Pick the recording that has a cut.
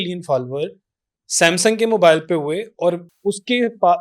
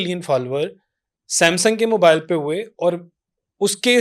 first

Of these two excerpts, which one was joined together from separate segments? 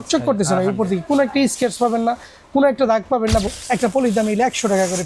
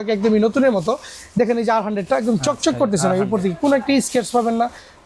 first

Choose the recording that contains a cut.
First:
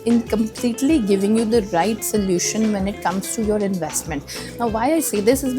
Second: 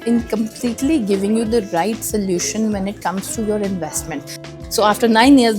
second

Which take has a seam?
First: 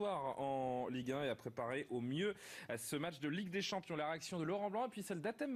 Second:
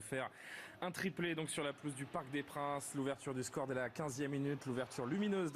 first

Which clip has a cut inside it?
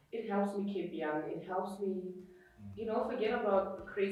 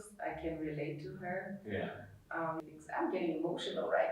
second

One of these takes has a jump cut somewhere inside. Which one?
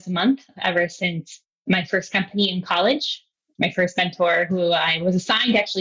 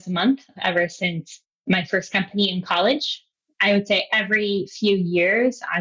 second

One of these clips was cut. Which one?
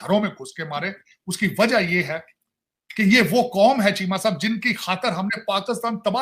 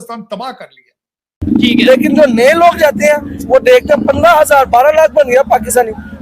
second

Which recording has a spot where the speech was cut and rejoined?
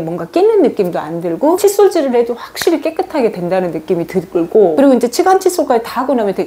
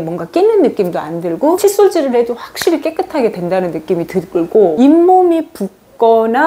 second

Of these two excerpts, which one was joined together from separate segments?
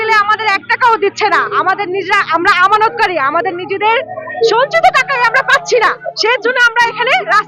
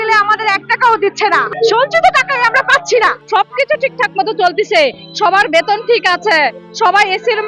second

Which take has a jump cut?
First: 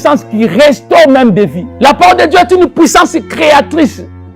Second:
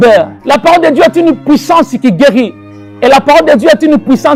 first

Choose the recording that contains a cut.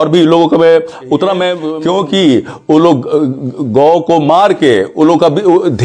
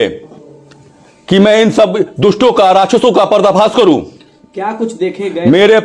first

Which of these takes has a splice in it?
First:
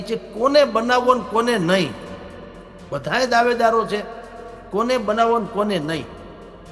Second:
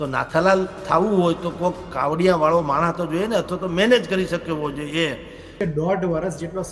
second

